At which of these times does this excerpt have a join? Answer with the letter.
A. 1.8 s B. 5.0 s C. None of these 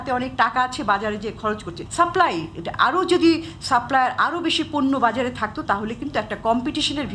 A